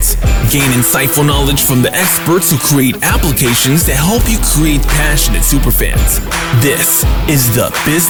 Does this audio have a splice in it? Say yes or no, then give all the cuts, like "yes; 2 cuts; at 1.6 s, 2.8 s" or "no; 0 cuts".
no; 0 cuts